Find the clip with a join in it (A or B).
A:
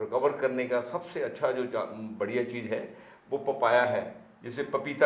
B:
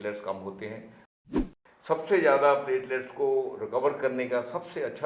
B